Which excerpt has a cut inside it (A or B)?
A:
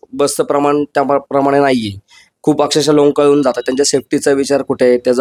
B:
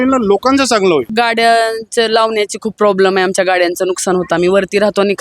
B